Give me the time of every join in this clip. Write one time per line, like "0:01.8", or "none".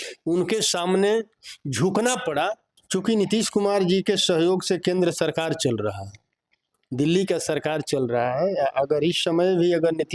0:02.7